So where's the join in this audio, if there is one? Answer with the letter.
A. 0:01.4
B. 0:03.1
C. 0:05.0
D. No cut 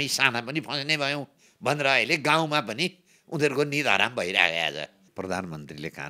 C